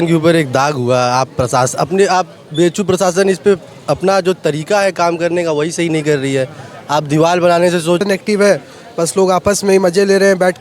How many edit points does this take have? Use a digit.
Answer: 1